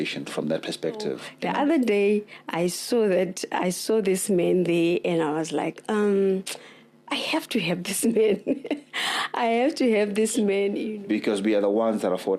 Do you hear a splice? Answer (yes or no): yes